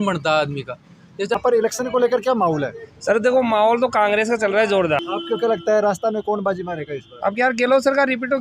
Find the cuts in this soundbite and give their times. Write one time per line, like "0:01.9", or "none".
0:01.3
0:05.0